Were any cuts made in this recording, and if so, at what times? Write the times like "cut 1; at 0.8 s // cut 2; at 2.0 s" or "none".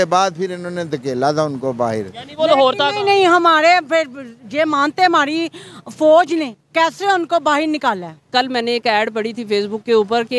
cut 1; at 8.3 s